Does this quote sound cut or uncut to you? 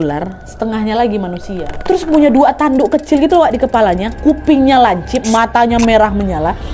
cut